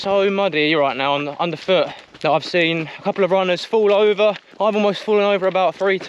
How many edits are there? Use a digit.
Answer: 1